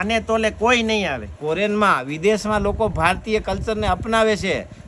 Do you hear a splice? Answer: yes; 1 cut; at 1.3 s

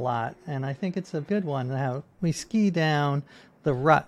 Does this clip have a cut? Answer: yes; 2 cuts; at 1.2 s, 2.1 s

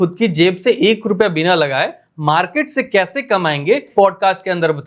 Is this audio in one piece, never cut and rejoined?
no; 1 cut; at 3.9 s

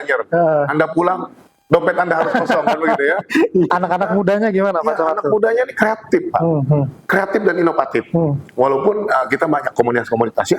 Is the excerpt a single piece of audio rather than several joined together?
no; 1 cut; at 3.7 s

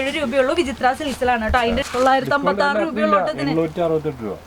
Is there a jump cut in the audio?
yes; 1 cut; at 1.8 s

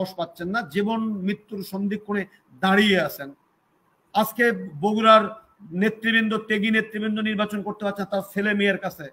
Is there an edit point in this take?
no; 0 cuts

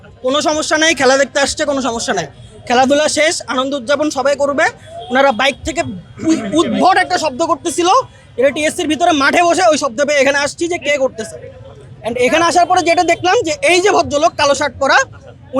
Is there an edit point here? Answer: no; 0 cuts

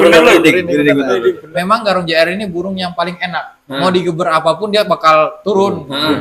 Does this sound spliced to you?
yes; 1 cut; at 1.4 s

